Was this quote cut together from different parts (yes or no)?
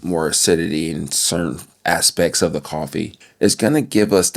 yes